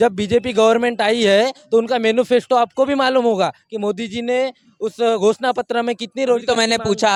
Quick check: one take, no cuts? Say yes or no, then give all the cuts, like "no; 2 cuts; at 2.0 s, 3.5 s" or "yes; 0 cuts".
yes; 0 cuts